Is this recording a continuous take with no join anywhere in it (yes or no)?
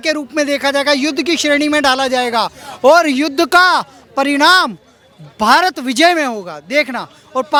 yes